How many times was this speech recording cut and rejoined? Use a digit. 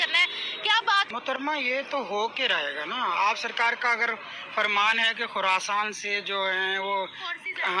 1